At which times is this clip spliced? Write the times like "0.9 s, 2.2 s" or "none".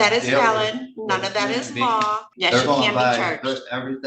2.3 s